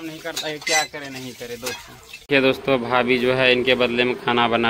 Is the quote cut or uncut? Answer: cut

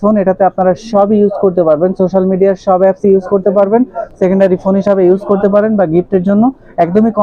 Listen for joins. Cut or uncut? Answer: uncut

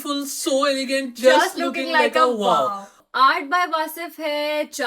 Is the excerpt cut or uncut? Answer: cut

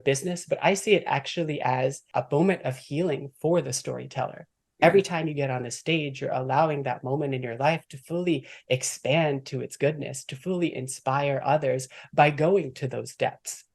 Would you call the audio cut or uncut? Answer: cut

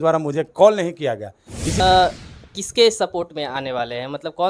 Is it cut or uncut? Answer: cut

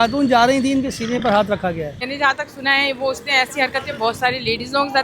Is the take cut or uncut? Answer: cut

